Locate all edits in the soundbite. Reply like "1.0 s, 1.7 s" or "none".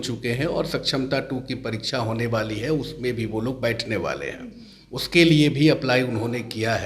none

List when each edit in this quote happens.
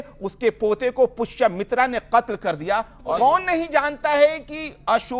3.2 s

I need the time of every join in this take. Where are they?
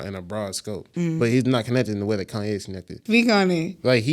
0.9 s, 3.0 s

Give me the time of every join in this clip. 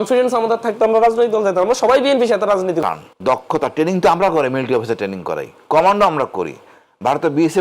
2.9 s

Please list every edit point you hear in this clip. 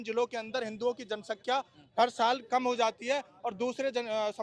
none

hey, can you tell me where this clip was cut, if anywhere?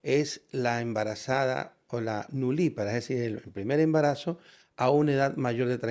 none

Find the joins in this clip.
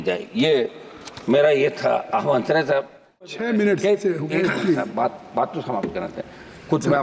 3.4 s

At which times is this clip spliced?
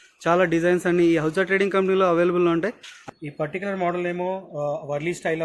2.9 s

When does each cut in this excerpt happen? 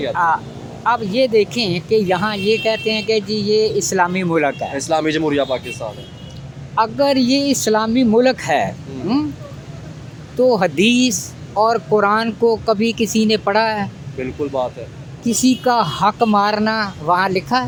none

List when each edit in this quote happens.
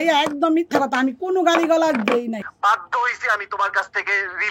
2.4 s

